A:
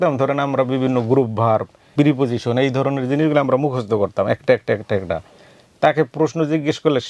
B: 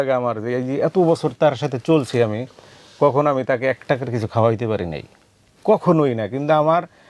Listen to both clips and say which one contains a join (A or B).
A